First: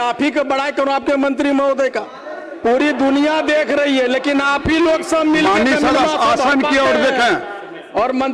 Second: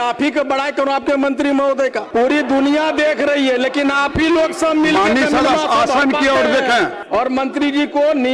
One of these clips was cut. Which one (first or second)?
second